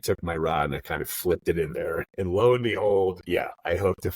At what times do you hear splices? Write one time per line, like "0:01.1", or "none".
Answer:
0:02.1
0:03.2